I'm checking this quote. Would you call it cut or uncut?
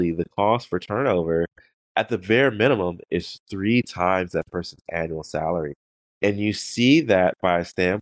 uncut